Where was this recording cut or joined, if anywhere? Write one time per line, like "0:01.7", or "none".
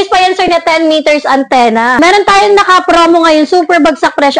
0:02.0

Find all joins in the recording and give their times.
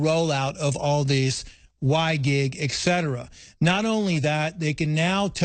none

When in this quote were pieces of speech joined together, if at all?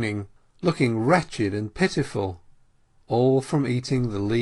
0:01.5

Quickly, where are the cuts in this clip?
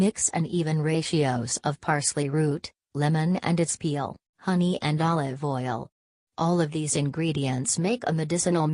none

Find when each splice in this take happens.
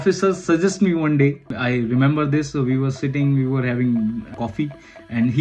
0:01.5
0:04.3

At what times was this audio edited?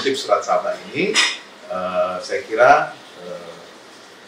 none

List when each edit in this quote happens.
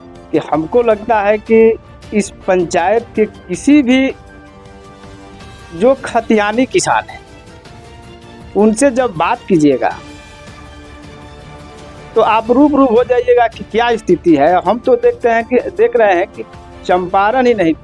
0:10.4
0:11.9

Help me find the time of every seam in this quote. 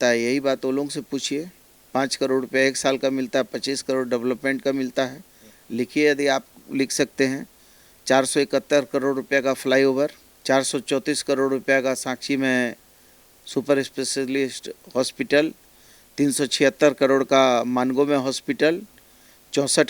none

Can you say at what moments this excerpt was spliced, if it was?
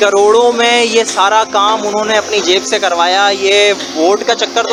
none

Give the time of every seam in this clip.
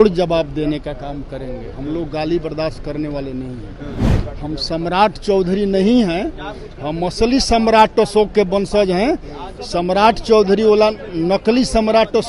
none

